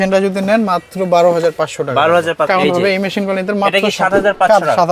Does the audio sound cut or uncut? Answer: cut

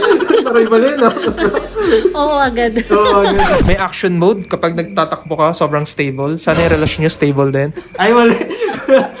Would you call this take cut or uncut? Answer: cut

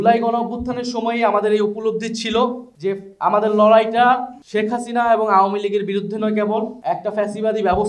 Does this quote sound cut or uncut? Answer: uncut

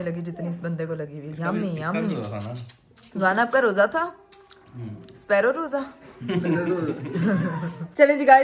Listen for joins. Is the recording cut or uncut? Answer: uncut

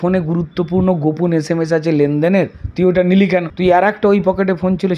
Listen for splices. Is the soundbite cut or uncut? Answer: cut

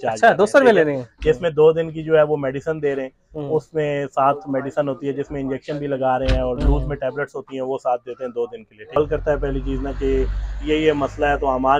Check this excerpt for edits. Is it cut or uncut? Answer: cut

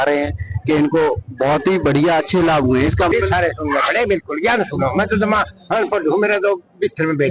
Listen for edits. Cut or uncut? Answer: cut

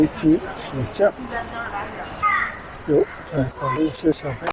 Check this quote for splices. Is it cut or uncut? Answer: cut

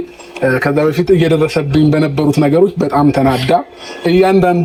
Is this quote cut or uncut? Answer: uncut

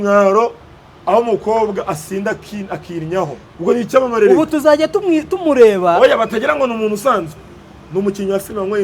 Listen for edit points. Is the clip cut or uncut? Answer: cut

